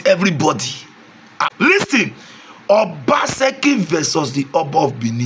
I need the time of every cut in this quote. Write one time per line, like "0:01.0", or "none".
0:01.3